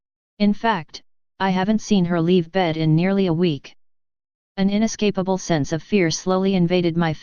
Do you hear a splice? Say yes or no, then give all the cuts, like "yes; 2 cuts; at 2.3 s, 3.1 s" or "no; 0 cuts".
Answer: yes; 1 cut; at 2.0 s